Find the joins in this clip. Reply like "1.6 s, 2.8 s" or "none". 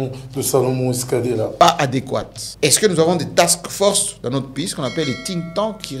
1.5 s, 2.4 s